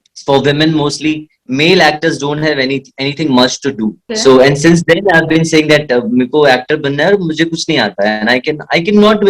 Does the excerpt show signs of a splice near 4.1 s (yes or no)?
yes